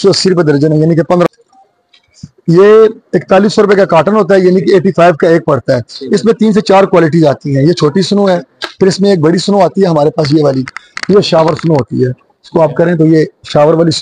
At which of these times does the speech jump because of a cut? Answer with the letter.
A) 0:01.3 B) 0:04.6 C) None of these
A